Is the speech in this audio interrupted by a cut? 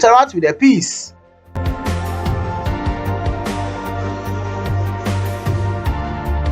yes; 1 cut; at 1.5 s

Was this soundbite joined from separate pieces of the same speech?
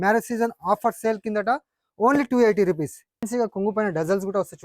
yes; 1 cut; at 3.3 s

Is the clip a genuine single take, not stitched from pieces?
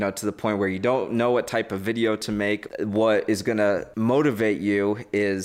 no; 2 cuts; at 2.6 s, 3.9 s

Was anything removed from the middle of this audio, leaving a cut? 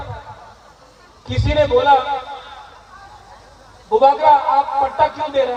no; 0 cuts

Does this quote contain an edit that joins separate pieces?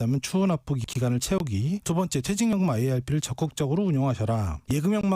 yes; 1 cut; at 1.8 s

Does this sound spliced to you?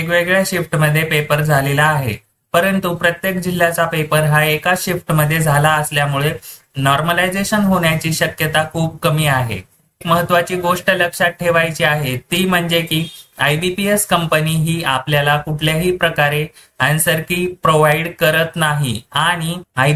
yes; 1 cut; at 10.0 s

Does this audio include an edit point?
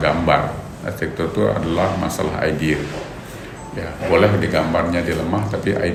no; 0 cuts

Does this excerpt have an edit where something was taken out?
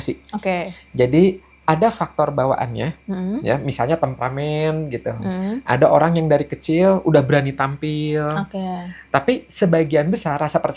no; 0 cuts

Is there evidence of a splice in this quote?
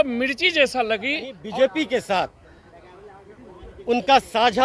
yes; 1 cut; at 1.4 s

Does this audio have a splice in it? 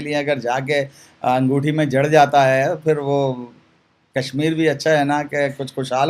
no; 0 cuts

